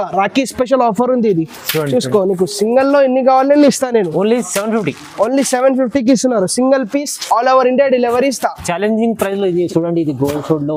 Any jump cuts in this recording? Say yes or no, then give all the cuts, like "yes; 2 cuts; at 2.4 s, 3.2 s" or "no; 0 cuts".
no; 0 cuts